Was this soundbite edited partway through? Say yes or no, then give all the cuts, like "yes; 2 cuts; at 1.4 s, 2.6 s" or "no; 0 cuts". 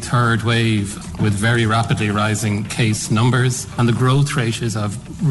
yes; 2 cuts; at 1.1 s, 3.7 s